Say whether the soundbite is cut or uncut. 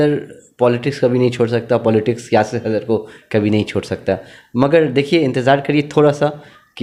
uncut